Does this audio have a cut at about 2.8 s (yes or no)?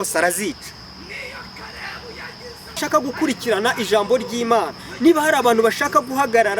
yes